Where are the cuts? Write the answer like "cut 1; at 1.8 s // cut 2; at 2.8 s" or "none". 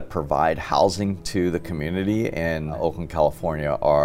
cut 1; at 2.8 s